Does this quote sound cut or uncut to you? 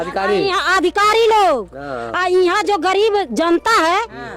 uncut